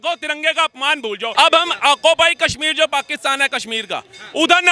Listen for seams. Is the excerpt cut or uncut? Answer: cut